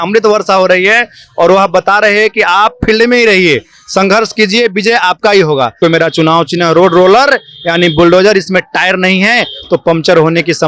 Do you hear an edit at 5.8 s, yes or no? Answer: yes